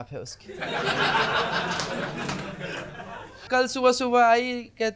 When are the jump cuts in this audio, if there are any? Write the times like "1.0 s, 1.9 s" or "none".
3.3 s